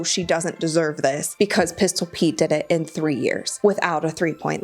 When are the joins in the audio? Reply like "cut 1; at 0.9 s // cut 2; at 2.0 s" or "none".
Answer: cut 1; at 1.2 s // cut 2; at 3.5 s